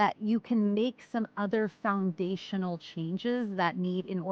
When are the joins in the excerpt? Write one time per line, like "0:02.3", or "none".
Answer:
none